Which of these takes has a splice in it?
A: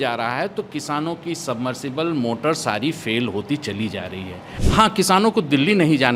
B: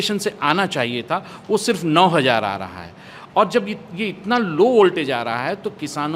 A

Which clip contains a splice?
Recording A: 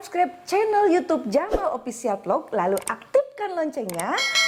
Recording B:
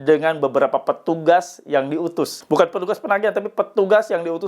B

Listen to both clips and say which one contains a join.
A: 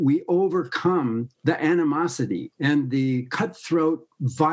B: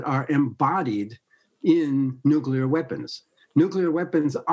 A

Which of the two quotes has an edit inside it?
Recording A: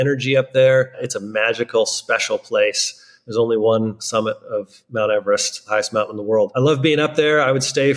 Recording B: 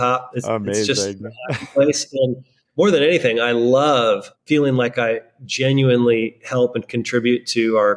A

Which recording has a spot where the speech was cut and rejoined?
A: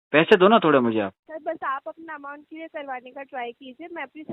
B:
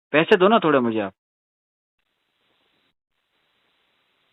A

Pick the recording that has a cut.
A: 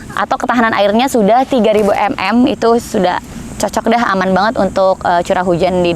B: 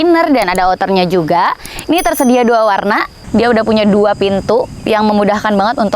B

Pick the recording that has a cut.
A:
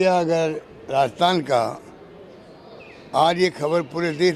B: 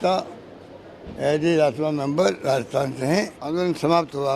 B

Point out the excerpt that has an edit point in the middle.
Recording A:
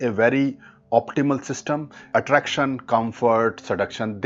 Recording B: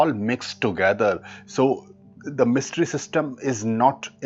A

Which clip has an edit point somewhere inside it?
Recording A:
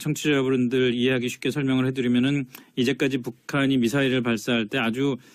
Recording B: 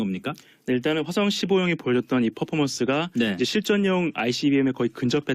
B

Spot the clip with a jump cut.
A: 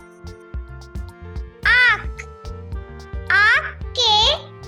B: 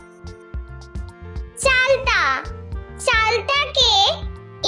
B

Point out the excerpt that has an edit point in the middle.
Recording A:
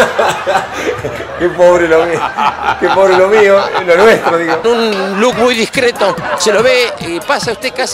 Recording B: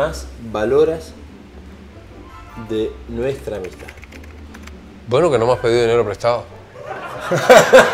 A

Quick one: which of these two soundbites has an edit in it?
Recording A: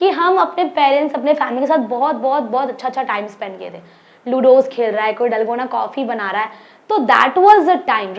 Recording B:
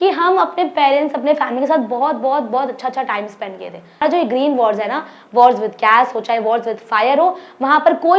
B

